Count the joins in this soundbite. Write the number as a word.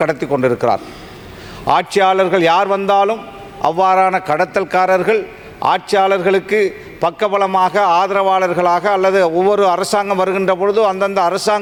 zero